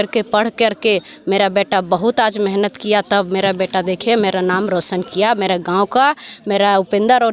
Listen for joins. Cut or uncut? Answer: uncut